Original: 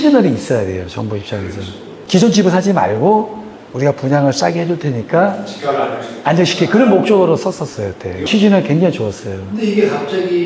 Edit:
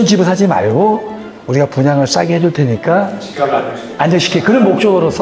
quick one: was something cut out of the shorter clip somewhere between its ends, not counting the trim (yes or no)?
no